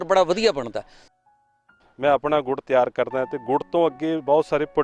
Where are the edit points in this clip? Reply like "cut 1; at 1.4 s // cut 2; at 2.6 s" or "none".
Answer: cut 1; at 1.4 s